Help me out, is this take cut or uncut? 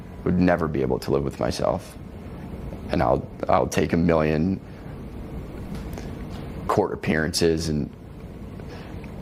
uncut